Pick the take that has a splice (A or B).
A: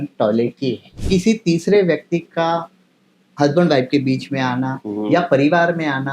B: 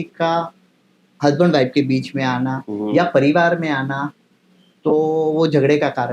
A